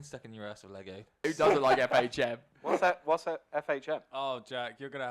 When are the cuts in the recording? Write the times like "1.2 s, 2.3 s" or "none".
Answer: 1.2 s